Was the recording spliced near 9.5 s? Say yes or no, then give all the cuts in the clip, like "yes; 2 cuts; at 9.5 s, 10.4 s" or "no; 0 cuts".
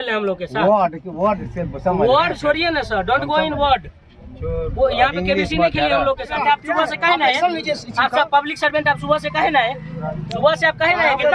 no; 1 cut; at 6.3 s